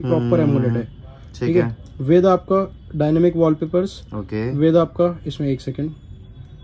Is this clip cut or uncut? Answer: uncut